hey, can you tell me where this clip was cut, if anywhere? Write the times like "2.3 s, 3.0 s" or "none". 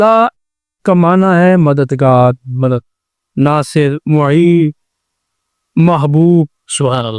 none